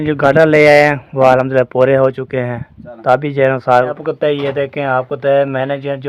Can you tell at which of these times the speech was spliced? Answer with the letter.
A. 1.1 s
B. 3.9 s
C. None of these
B